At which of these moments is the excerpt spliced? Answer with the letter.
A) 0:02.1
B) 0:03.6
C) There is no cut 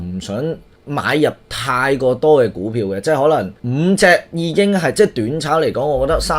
B